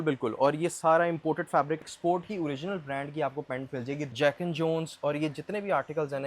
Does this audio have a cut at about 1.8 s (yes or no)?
yes